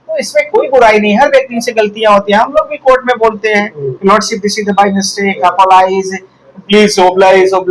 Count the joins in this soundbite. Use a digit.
0